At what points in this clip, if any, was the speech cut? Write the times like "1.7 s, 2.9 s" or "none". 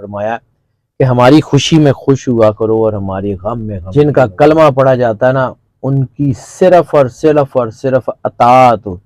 3.7 s